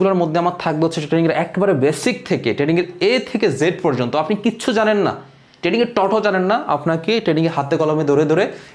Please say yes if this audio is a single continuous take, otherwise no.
yes